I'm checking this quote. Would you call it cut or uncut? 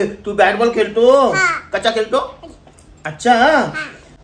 uncut